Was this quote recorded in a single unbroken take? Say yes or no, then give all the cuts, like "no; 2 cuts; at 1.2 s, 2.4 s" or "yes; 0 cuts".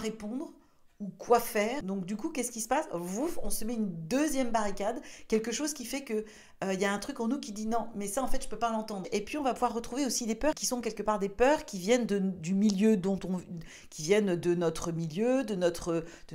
yes; 0 cuts